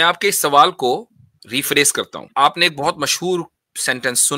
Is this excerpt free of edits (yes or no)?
no